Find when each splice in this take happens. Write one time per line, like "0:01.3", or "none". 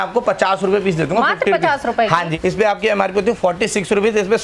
0:02.3